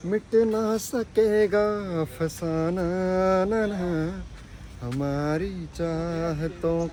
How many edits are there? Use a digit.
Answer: 0